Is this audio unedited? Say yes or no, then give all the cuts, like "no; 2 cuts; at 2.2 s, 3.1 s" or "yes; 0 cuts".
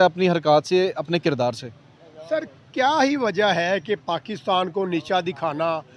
yes; 0 cuts